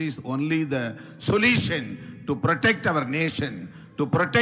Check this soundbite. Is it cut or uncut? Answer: uncut